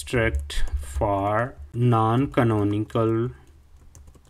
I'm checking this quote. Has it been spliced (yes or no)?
yes